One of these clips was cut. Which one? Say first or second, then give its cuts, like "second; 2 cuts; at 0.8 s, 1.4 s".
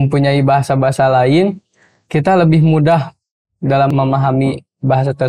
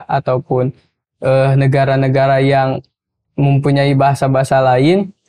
first; 1 cut; at 3.9 s